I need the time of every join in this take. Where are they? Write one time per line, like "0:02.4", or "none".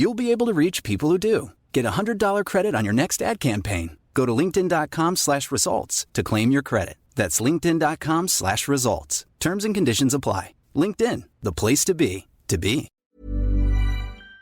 0:13.0

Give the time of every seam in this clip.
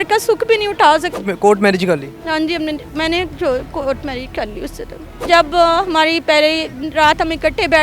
0:01.1
0:05.2

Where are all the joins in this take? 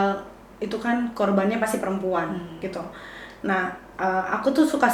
none

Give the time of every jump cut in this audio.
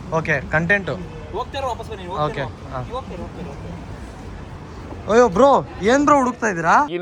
none

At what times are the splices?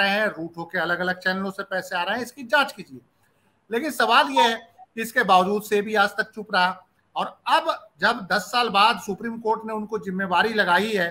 none

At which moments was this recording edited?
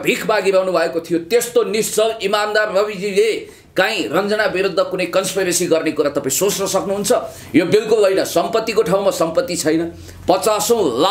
none

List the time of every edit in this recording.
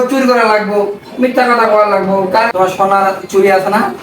0:02.5

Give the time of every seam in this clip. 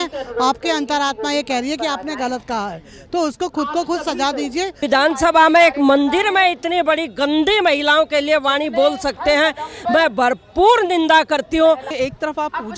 0:04.8
0:11.9

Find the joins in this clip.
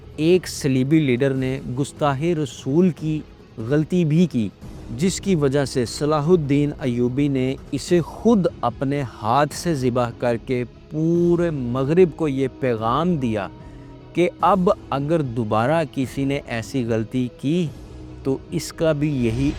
none

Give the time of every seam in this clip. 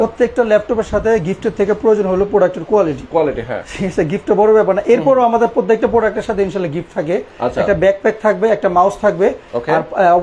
none

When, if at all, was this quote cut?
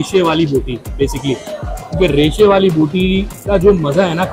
none

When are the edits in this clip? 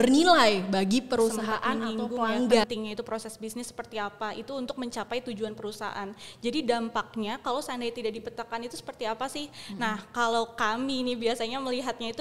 0:02.6

